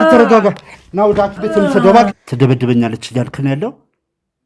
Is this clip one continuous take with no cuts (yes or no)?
no